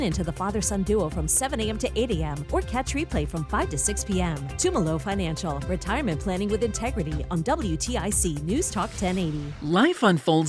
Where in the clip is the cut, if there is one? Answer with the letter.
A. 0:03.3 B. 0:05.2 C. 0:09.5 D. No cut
C